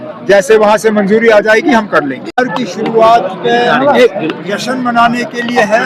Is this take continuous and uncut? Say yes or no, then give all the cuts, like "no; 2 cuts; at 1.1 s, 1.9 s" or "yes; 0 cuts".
no; 1 cut; at 2.2 s